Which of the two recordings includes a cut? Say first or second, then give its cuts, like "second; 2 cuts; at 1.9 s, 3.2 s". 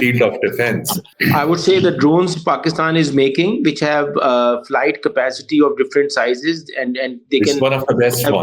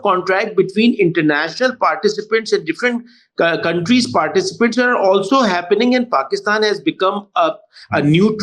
first; 1 cut; at 1.0 s